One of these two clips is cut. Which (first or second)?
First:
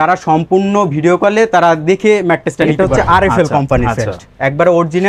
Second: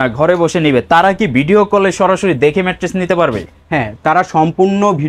first